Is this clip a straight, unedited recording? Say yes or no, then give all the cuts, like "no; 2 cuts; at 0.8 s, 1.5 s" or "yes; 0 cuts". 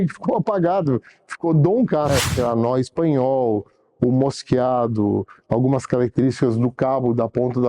no; 1 cut; at 2.1 s